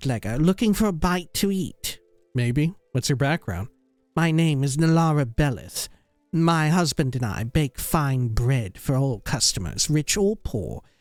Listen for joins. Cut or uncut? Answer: uncut